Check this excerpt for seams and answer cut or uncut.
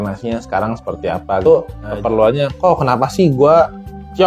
cut